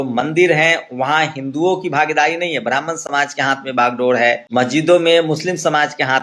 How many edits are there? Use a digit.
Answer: 1